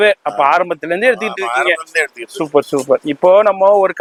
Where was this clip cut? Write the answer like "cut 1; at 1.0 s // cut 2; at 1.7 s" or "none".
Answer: none